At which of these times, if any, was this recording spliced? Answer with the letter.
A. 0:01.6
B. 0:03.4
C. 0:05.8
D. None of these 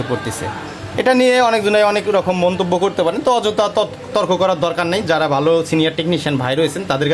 D